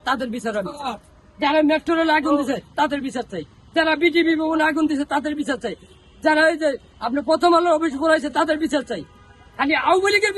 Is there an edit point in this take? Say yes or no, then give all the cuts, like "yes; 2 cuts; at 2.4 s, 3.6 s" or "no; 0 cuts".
no; 0 cuts